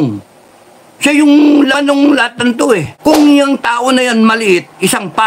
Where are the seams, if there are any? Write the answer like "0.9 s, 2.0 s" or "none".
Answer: 2.9 s